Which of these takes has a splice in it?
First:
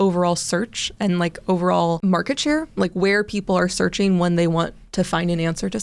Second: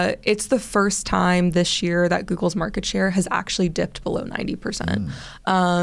first; 1 cut; at 2.0 s

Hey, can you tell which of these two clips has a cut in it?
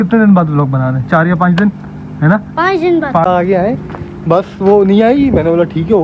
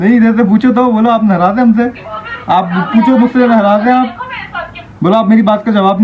first; 1 cut; at 3.3 s

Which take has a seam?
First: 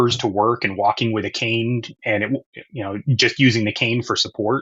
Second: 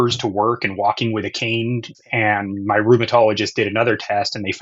second; 1 cut; at 1.9 s

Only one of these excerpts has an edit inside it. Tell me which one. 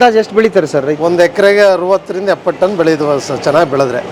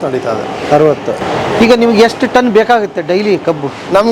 second; 1 cut; at 1.2 s

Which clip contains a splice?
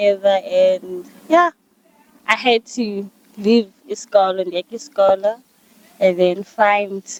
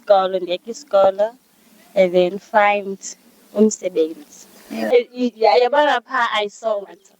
second; 1 cut; at 4.8 s

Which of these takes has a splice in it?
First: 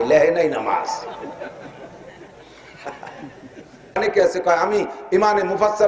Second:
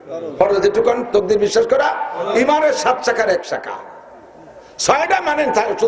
first; 1 cut; at 4.0 s

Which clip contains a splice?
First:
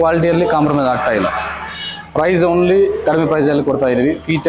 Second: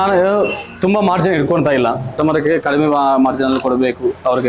second; 1 cut; at 2.1 s

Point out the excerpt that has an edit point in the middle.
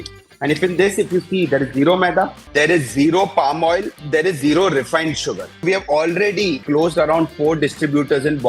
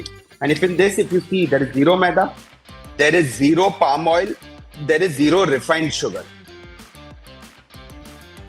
first; 4 cuts; at 2.4 s, 3.9 s, 5.6 s, 6.6 s

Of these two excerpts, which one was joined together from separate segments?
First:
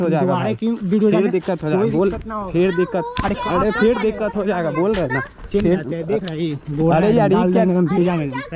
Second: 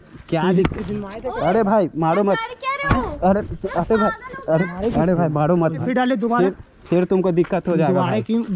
second; 1 cut; at 5.8 s

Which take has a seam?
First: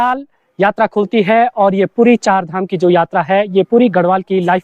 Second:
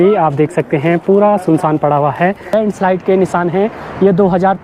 second; 1 cut; at 2.5 s

